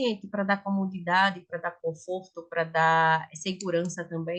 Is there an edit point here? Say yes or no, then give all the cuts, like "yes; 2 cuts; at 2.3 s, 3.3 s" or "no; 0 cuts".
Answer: no; 0 cuts